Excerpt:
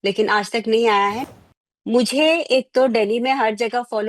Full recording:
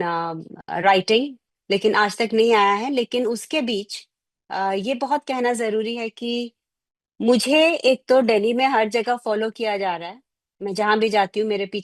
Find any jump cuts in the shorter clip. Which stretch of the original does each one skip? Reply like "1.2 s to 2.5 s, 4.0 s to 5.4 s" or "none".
2.9 s to 6.5 s